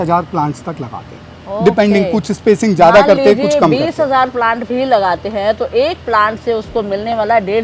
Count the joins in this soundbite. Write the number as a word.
zero